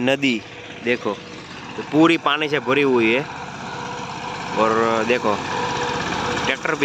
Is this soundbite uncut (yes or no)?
yes